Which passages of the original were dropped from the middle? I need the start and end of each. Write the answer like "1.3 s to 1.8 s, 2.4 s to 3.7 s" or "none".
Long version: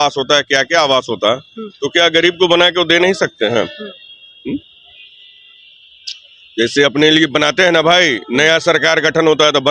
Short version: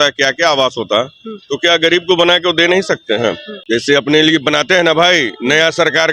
3.8 s to 6.4 s